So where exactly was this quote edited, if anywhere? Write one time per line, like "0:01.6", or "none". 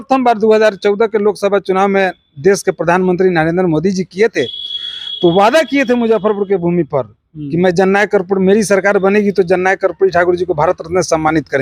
none